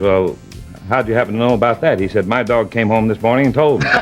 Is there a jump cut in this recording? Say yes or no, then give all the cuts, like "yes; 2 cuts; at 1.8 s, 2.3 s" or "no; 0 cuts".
no; 0 cuts